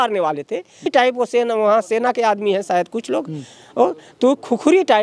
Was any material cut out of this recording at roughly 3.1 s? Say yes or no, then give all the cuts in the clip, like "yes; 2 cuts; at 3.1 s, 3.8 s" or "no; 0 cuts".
no; 1 cut; at 0.9 s